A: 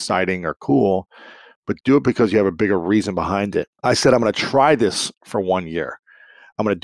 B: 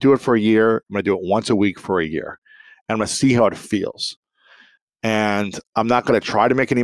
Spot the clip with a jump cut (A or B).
A